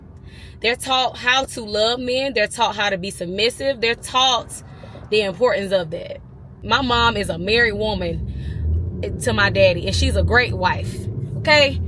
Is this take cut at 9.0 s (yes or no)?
no